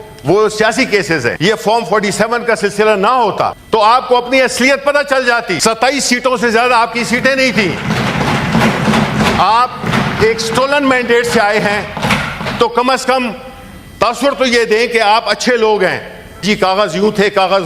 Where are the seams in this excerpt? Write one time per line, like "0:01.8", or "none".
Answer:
0:01.4
0:03.6
0:05.5
0:09.8
0:16.4